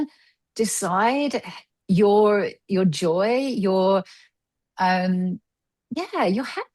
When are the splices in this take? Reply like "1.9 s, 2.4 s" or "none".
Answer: none